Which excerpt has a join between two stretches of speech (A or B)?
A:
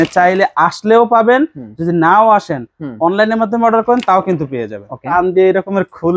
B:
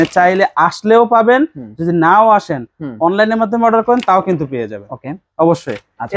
A